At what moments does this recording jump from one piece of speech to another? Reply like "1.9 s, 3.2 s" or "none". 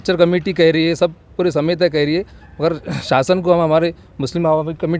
none